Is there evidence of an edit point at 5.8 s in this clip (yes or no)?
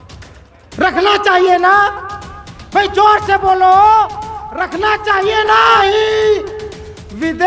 yes